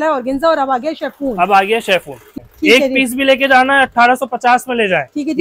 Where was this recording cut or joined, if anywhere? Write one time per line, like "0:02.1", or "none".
0:02.5

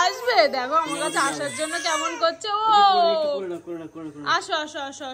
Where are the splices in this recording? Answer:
none

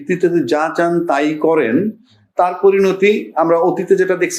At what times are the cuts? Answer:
none

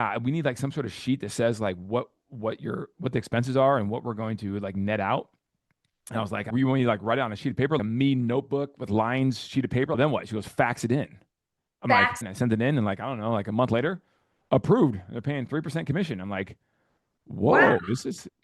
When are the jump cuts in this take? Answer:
0:06.5
0:07.8
0:09.9
0:12.2

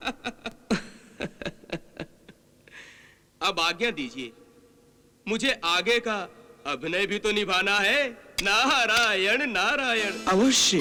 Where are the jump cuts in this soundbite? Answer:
none

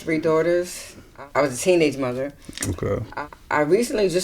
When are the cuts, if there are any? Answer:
0:01.1
0:03.1

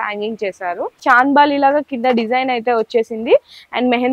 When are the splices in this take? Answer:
0:01.0

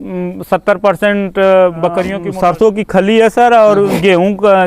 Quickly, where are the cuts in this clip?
0:02.2

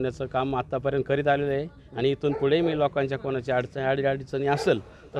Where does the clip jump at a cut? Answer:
none

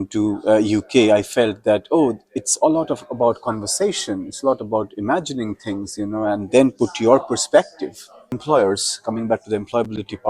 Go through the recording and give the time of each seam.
0:08.4

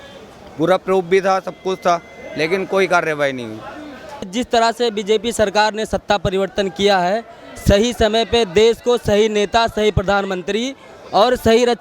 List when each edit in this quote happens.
0:04.3

